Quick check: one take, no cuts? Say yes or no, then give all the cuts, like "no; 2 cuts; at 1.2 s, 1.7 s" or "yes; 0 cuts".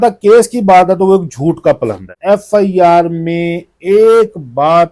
no; 1 cut; at 2.1 s